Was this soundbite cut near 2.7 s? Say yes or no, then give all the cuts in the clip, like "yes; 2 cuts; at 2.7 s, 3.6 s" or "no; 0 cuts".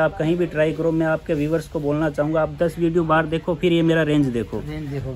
no; 0 cuts